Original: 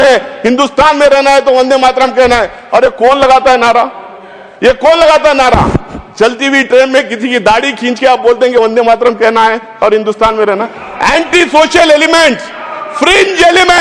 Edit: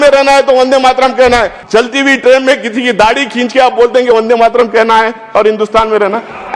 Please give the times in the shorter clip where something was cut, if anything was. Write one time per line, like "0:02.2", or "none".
0:01.6